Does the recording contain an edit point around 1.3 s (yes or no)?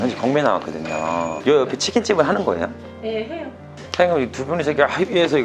yes